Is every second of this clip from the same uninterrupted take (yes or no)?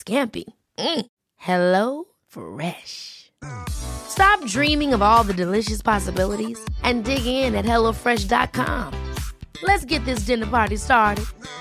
yes